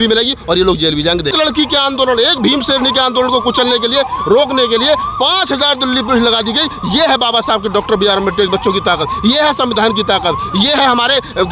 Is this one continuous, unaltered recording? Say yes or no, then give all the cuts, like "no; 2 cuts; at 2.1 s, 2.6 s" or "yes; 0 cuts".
no; 1 cut; at 1.3 s